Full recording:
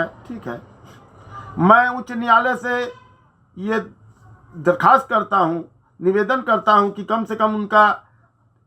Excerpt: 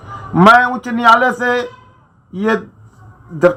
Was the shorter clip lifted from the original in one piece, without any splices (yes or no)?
yes